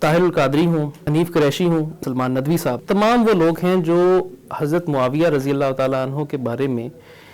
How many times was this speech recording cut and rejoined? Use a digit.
2